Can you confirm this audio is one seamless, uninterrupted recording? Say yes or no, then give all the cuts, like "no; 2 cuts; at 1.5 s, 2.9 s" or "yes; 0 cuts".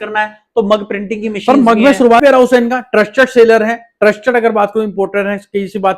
no; 1 cut; at 2.2 s